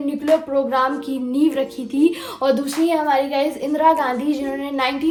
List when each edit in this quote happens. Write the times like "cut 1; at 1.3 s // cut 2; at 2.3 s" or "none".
none